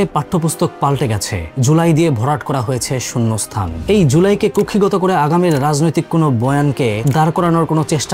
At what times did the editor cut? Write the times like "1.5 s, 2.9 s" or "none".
none